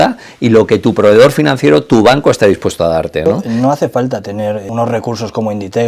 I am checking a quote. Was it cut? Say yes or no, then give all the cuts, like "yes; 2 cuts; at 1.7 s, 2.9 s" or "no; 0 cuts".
yes; 2 cuts; at 3.2 s, 4.7 s